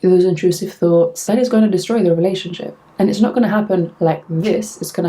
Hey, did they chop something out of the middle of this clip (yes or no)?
yes